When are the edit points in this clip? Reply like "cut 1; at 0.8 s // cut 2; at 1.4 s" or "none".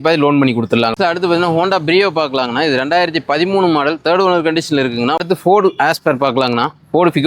cut 1; at 0.9 s // cut 2; at 5.2 s